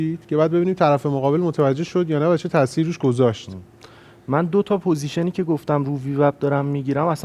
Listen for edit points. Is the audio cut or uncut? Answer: uncut